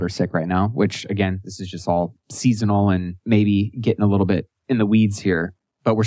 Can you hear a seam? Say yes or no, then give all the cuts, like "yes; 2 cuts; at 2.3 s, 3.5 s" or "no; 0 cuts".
yes; 2 cuts; at 3.1 s, 4.5 s